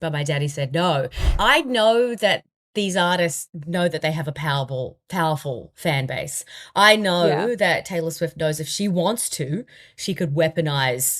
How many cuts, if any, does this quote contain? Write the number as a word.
one